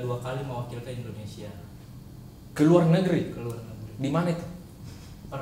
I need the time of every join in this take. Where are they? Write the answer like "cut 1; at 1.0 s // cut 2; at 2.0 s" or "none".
none